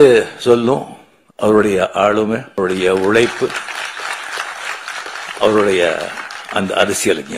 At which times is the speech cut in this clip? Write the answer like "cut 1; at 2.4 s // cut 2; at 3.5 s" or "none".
cut 1; at 2.6 s